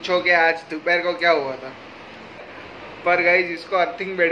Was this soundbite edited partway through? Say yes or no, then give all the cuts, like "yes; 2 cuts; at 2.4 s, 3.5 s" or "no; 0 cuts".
yes; 1 cut; at 2.5 s